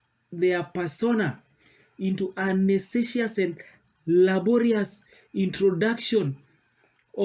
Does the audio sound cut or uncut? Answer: uncut